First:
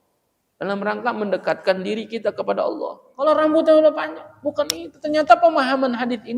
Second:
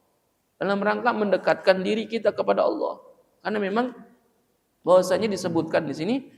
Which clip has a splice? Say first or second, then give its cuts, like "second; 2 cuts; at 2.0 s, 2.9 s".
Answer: first; 1 cut; at 3.0 s